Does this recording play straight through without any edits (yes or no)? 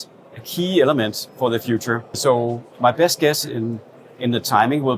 no